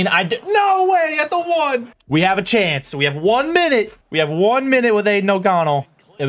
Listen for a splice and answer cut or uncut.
cut